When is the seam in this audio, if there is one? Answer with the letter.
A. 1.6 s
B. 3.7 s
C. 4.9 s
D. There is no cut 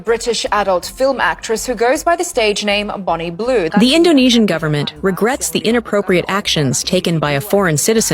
B